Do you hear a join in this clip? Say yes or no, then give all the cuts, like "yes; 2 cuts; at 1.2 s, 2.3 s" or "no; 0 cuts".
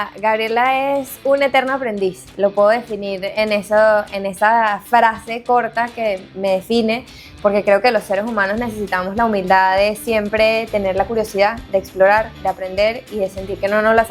no; 0 cuts